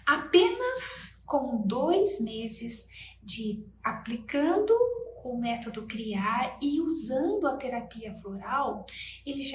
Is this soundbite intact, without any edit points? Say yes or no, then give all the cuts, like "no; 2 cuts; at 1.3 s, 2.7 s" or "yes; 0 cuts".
yes; 0 cuts